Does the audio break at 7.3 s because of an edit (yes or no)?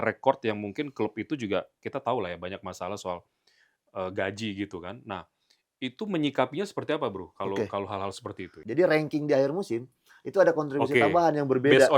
no